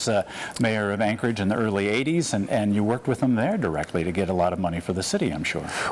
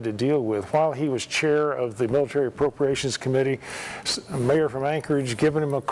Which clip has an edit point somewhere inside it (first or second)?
second